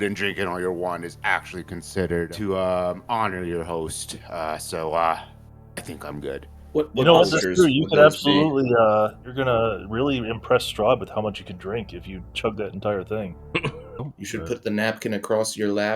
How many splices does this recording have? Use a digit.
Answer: 3